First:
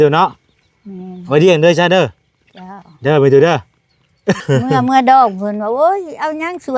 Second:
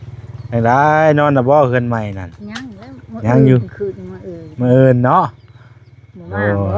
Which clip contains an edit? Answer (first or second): first